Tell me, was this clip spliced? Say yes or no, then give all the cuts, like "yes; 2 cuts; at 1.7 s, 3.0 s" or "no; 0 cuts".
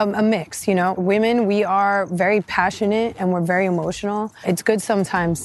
yes; 2 cuts; at 1.0 s, 4.4 s